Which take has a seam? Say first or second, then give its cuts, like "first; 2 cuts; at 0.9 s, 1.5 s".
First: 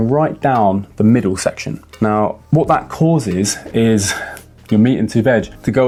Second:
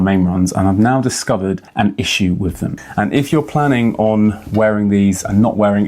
second; 1 cut; at 2.7 s